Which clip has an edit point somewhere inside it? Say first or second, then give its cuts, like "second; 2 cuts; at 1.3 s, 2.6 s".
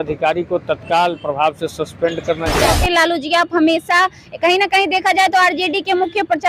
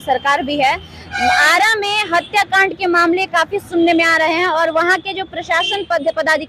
first; 1 cut; at 2.7 s